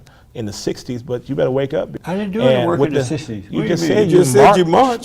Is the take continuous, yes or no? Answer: no